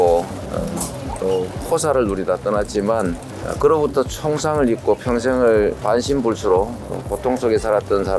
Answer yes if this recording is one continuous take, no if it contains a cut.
no